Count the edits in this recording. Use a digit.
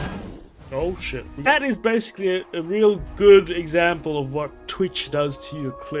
1